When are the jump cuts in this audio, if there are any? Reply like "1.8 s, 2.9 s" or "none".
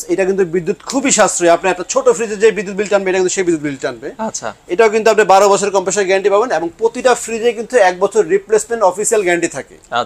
none